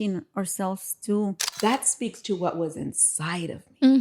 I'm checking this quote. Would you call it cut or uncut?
cut